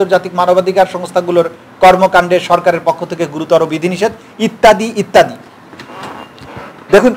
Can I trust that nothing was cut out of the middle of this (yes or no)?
yes